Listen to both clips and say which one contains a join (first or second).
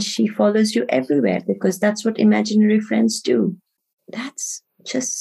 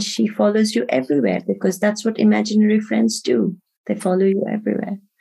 first